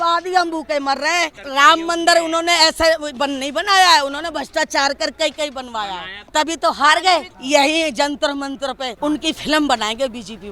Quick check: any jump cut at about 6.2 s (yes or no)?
yes